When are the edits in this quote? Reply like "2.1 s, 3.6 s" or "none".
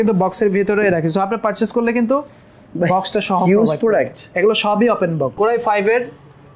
4.2 s, 5.3 s